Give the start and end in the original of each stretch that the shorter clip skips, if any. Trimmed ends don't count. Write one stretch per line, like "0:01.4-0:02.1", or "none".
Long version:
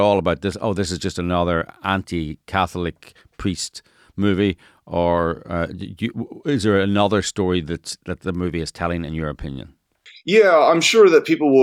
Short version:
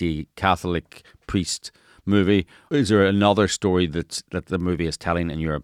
0:04.7-0:06.3